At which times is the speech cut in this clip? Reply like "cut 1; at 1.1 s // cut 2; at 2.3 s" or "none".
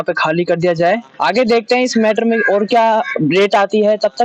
none